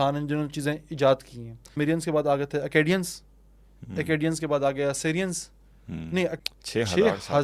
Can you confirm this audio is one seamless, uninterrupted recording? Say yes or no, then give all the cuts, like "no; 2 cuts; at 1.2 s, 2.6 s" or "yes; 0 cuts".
no; 2 cuts; at 1.6 s, 6.4 s